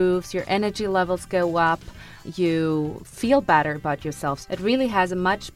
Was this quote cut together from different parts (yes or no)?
yes